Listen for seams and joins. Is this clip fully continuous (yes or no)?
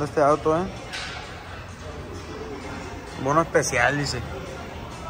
yes